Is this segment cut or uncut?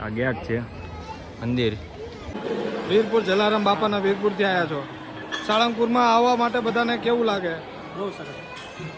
cut